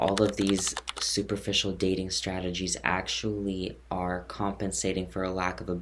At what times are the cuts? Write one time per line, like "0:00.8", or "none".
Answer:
none